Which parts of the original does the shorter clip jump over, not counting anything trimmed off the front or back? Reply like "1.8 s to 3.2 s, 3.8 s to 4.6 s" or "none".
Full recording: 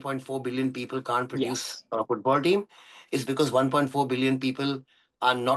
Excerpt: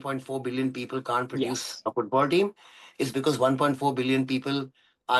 1.9 s to 2.0 s